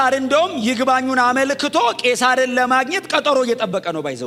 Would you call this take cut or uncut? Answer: uncut